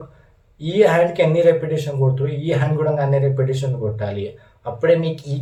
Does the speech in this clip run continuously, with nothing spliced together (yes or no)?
yes